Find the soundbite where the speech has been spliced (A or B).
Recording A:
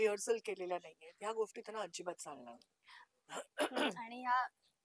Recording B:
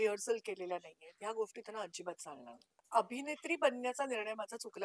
B